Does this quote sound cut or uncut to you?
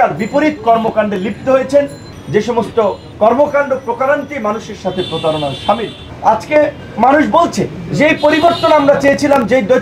cut